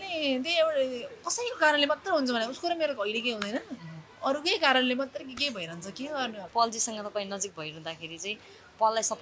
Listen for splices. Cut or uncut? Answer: cut